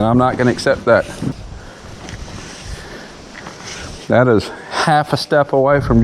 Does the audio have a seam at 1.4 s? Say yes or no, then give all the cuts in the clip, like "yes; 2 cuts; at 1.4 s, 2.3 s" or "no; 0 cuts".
yes; 1 cut; at 1.4 s